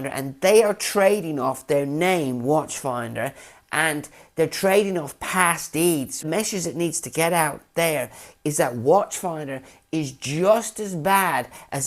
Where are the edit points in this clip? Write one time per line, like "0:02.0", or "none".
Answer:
0:06.2